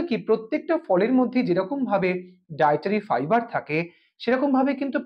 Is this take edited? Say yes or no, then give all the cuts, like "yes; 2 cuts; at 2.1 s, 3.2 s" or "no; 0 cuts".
no; 0 cuts